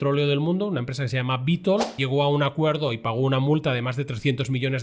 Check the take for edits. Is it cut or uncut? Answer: cut